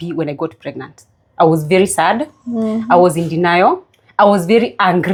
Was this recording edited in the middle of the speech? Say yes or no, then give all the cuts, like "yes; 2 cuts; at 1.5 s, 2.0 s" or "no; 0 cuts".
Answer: no; 0 cuts